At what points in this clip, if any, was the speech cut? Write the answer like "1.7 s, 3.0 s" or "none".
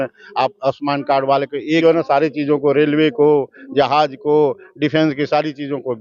1.8 s